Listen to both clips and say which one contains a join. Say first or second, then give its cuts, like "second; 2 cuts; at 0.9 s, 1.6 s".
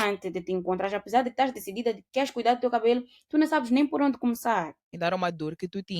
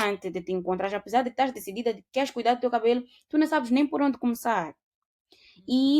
first; 1 cut; at 4.8 s